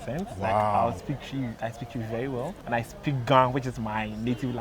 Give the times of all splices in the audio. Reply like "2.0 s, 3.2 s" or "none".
2.6 s